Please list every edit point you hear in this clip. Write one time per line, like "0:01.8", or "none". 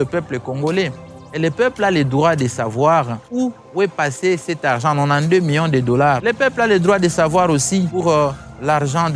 0:06.2